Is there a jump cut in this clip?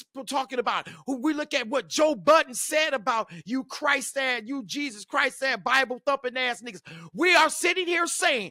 no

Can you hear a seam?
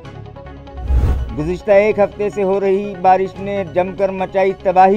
yes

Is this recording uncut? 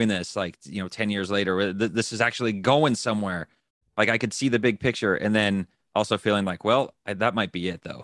yes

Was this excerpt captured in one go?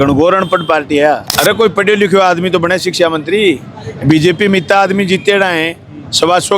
no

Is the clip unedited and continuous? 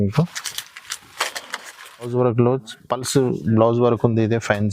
no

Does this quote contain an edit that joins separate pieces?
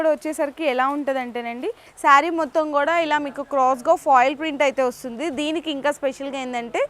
yes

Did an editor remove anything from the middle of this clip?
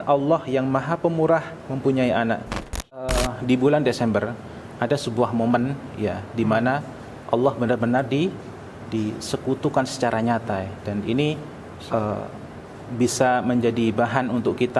yes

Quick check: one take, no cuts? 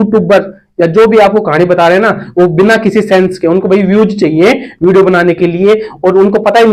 yes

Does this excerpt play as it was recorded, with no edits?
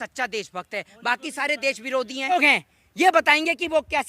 no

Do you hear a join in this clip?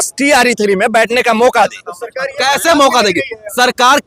no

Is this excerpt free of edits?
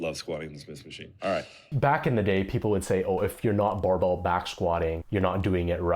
no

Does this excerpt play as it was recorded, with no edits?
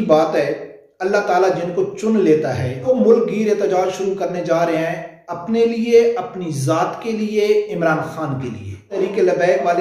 no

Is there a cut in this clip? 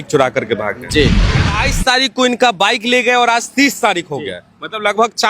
yes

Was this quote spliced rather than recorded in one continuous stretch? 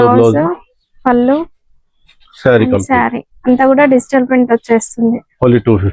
no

